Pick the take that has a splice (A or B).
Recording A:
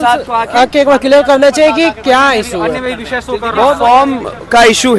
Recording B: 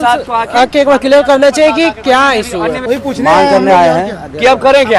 B